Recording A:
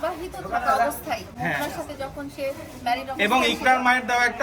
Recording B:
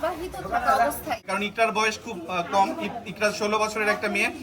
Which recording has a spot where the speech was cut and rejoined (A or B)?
B